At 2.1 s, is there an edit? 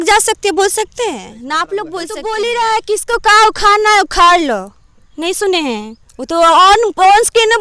yes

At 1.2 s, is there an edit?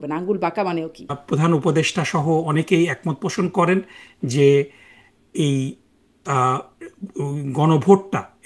yes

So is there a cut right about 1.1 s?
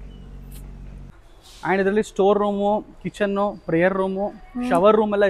yes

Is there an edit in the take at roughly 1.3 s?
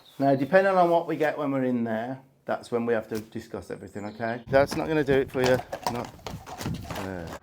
no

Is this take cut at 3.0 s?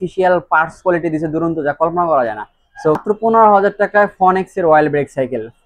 yes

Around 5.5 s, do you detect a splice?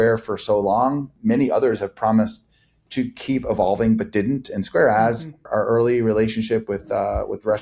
yes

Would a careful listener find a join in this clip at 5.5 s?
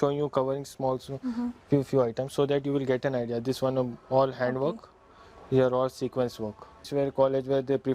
no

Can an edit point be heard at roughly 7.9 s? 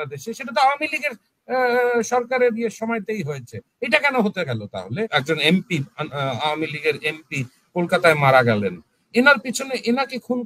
no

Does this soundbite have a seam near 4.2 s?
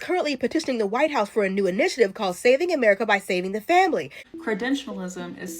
yes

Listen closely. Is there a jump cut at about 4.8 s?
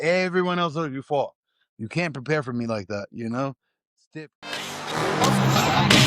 yes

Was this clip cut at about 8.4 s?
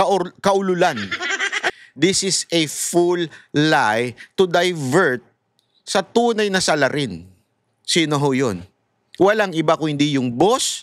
no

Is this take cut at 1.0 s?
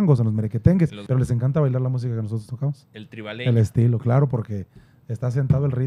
yes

